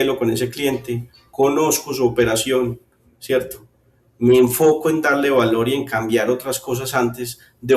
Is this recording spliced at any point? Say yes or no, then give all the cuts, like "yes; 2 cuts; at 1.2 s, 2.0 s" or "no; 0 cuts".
no; 0 cuts